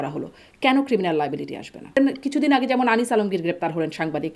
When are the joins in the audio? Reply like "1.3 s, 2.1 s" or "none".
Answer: 2.0 s